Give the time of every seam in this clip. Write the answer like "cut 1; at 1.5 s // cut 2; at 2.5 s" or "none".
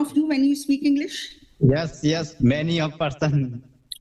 cut 1; at 2.3 s